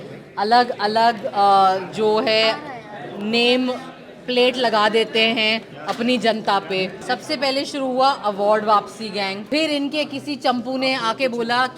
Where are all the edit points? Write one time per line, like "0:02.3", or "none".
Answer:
0:07.0
0:09.4